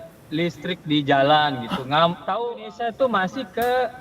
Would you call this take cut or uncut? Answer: cut